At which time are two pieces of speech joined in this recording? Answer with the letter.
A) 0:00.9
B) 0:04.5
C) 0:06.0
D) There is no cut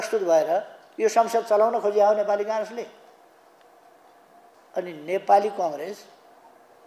B